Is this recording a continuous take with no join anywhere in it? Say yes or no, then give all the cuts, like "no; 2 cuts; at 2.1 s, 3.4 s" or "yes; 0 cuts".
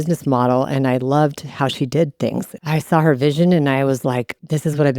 no; 1 cut; at 2.5 s